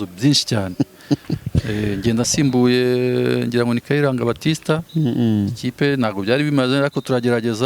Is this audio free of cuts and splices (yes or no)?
yes